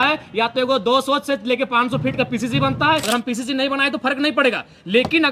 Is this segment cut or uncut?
cut